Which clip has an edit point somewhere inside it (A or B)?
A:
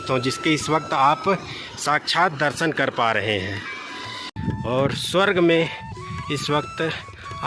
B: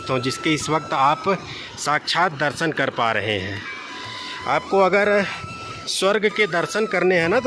A